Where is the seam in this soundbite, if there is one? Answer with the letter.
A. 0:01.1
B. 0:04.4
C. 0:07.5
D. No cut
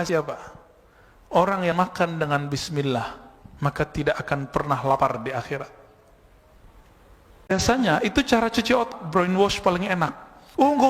C